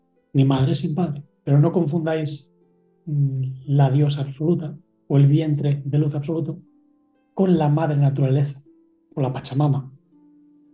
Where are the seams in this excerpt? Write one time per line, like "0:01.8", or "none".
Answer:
0:01.3